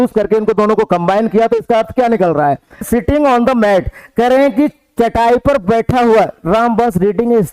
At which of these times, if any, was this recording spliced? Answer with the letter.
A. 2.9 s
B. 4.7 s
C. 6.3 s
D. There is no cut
A